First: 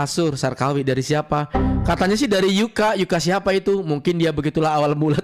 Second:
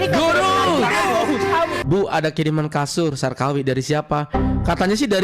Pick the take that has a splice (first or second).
second